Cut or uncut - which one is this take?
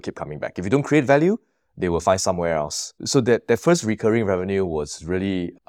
cut